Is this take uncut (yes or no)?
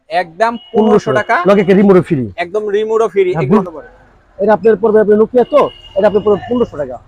no